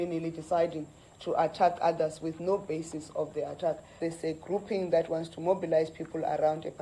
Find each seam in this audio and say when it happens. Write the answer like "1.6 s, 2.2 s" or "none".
4.0 s